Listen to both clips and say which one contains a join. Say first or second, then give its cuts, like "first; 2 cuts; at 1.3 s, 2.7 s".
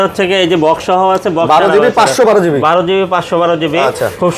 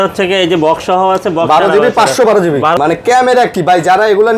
second; 1 cut; at 2.8 s